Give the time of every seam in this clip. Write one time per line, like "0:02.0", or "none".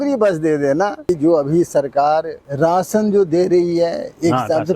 0:01.0
0:02.4

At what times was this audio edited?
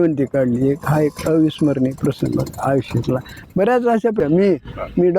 0:04.2

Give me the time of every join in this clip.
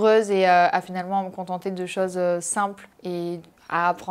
none

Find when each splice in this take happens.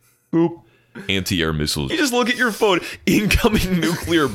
0:01.9

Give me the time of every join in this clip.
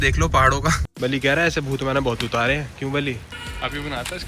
0:00.9
0:03.3

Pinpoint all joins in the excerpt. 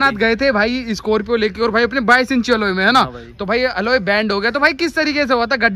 none

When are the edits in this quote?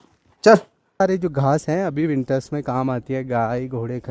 0:01.0

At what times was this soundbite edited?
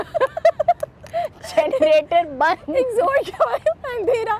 none

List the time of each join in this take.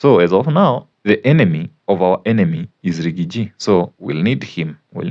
0:00.9
0:01.7

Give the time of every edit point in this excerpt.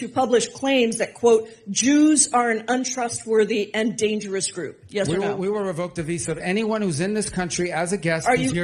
none

